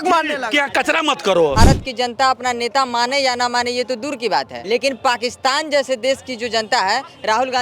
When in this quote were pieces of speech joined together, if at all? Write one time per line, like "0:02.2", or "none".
0:01.5
0:04.6